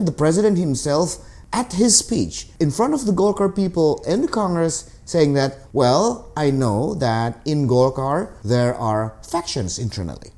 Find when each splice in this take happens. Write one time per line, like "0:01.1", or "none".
0:02.4
0:05.6
0:08.4